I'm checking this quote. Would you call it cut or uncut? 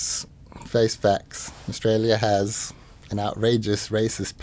uncut